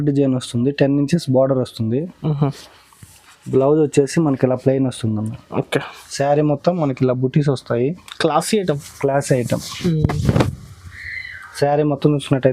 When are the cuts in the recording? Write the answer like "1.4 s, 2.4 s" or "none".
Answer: 6.0 s